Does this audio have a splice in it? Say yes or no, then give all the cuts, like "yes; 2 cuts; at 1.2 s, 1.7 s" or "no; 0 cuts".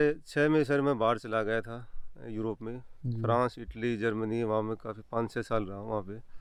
no; 0 cuts